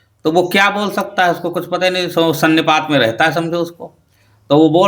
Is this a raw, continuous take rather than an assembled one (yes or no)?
yes